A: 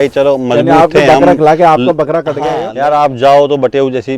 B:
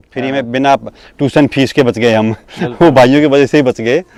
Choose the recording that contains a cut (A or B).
A